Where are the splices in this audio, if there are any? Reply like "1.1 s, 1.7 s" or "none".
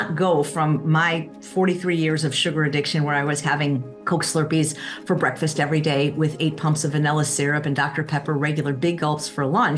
3.9 s